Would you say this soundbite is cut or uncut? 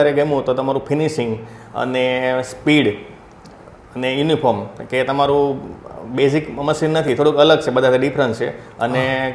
uncut